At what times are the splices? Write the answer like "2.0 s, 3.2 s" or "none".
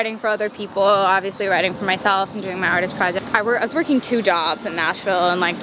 3.2 s